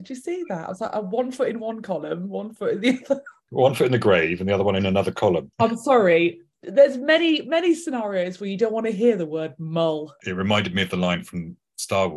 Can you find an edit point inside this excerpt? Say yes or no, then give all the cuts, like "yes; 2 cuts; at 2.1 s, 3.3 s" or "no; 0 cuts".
yes; 2 cuts; at 5.5 s, 10.2 s